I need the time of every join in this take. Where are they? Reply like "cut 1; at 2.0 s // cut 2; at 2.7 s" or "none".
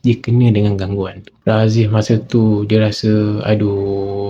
cut 1; at 1.3 s